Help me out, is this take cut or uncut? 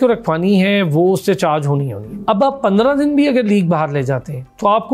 cut